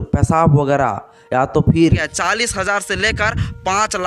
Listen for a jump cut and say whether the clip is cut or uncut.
cut